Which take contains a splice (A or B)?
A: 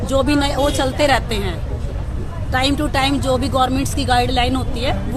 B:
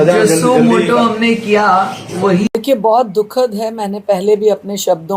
B